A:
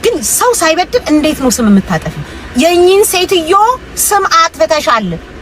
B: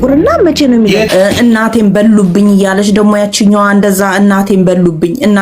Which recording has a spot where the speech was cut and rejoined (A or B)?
B